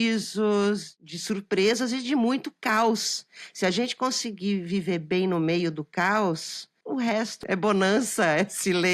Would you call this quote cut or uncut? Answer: cut